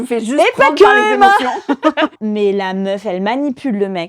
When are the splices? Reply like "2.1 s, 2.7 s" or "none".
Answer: 2.1 s